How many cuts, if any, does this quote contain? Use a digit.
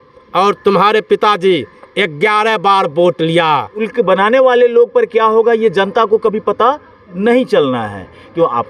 1